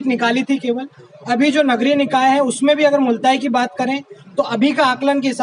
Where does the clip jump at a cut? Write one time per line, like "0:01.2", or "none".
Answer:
none